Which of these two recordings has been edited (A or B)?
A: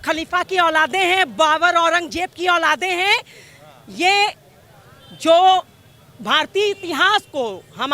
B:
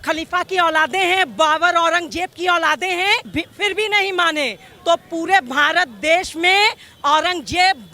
B